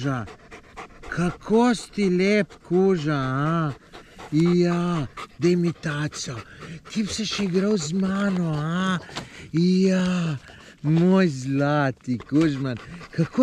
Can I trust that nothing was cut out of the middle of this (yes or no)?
yes